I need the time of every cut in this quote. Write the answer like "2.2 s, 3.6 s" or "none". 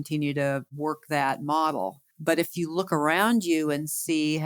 none